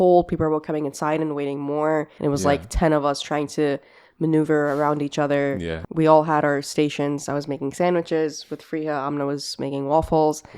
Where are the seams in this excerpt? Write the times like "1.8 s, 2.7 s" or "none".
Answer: 2.1 s, 5.8 s